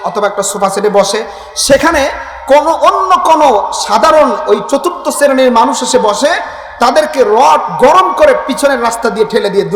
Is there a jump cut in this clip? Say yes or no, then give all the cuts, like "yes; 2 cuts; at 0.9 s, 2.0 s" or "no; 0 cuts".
no; 0 cuts